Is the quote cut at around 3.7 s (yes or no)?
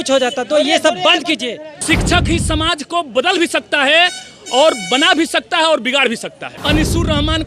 no